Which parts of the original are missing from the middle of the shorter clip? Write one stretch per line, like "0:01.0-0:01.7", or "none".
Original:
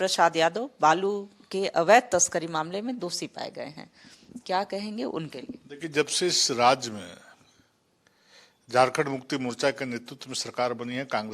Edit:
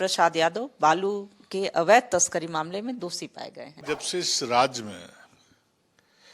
0:03.7-0:05.8